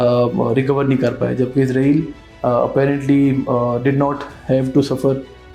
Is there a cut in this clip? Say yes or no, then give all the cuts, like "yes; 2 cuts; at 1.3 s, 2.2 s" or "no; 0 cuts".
no; 0 cuts